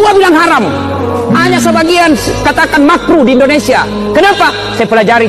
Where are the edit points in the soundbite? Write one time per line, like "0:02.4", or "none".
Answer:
none